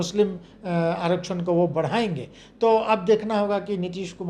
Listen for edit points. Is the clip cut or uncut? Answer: uncut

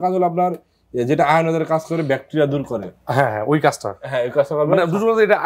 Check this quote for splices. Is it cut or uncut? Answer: uncut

